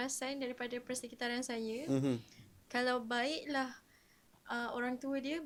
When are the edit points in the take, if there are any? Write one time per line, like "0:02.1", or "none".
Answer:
none